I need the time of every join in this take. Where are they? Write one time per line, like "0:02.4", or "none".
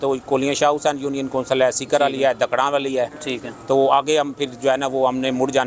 none

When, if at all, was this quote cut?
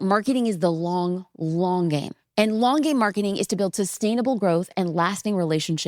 0:02.2

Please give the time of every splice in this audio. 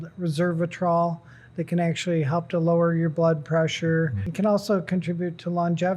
0:04.2

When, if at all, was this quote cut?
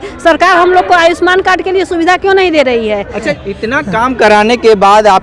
0:03.4

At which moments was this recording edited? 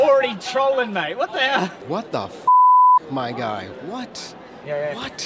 0:01.8

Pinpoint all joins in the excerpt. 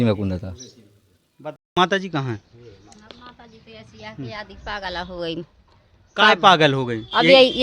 0:01.6

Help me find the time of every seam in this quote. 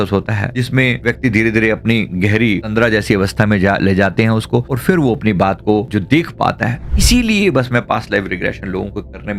0:06.9

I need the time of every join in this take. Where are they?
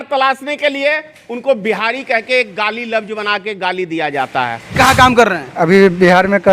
0:04.8

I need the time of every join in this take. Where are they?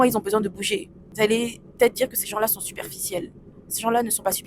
0:01.0

